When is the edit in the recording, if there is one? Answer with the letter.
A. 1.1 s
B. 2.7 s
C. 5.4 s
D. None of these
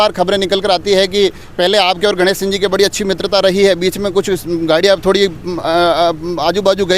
D